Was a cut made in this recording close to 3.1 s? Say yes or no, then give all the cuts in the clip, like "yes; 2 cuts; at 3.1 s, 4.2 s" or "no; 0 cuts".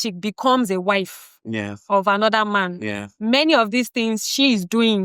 no; 0 cuts